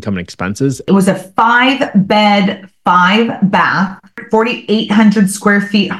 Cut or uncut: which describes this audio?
cut